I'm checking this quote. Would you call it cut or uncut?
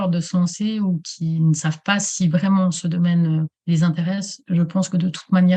uncut